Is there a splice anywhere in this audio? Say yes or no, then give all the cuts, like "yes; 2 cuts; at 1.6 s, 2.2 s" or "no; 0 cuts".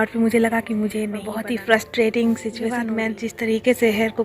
yes; 2 cuts; at 1.2 s, 2.8 s